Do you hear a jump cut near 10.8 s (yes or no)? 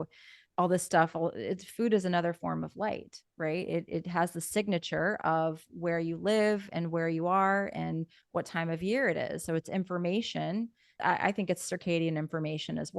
yes